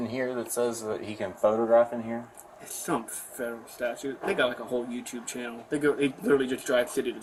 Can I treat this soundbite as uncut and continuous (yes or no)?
yes